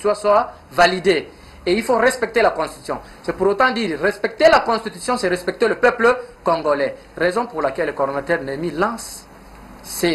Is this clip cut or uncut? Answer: uncut